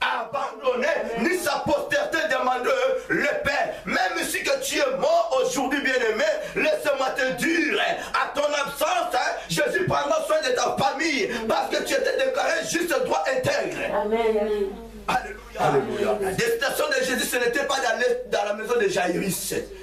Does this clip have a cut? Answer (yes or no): yes